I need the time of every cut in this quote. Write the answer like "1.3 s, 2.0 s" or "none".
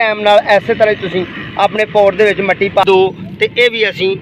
2.8 s